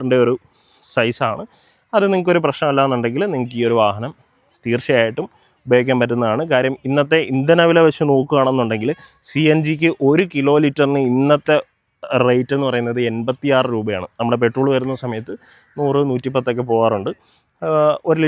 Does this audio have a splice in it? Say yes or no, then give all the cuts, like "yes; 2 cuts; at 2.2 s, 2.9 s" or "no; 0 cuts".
no; 0 cuts